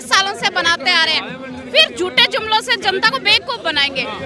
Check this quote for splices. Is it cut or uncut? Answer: uncut